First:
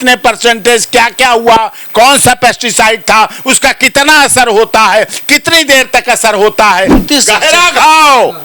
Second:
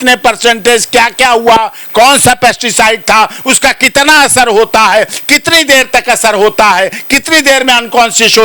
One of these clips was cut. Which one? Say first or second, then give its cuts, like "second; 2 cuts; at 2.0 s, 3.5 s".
first; 1 cut; at 7.0 s